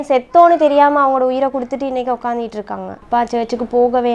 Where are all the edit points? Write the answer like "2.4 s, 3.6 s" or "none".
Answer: 3.0 s

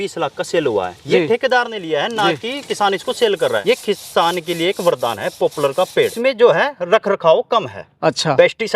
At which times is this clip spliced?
3.6 s, 6.0 s

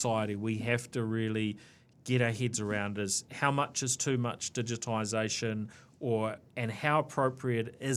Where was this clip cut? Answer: none

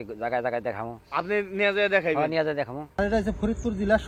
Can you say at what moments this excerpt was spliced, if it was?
3.0 s

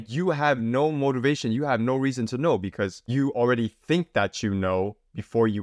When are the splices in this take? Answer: 3.0 s

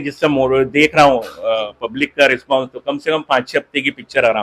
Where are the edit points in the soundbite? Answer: none

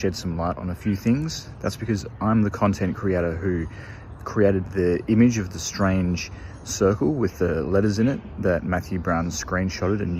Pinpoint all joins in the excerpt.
none

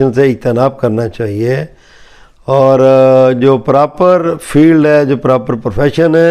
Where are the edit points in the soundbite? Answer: none

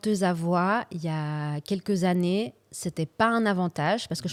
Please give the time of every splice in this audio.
none

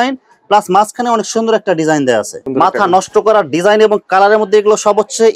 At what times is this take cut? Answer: 2.4 s

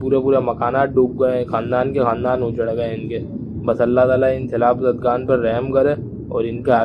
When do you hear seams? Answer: none

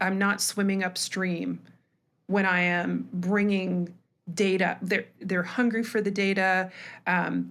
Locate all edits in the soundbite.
none

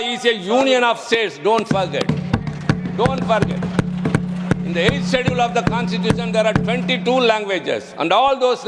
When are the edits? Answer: none

